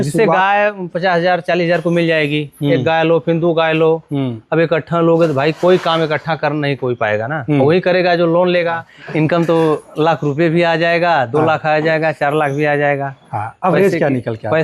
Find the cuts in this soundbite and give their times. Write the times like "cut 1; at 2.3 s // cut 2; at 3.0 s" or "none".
cut 1; at 8.9 s